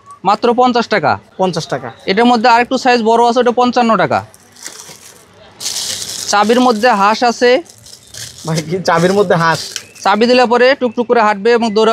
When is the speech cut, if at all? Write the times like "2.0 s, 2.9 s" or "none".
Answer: none